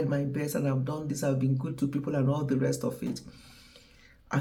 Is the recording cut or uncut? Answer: uncut